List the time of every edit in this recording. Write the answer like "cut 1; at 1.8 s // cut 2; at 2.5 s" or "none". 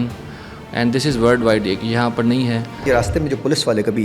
cut 1; at 2.8 s

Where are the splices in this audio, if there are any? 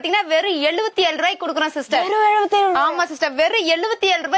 none

